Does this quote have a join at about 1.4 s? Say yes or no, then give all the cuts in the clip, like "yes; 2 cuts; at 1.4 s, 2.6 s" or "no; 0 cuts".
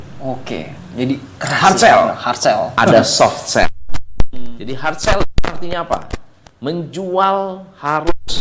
no; 0 cuts